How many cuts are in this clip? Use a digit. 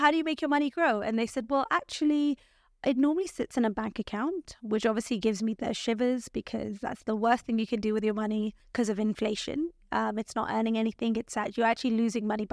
1